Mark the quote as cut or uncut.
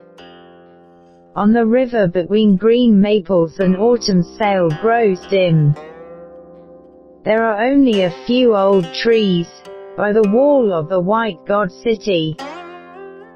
cut